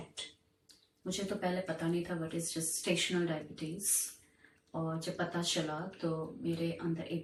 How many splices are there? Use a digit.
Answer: 0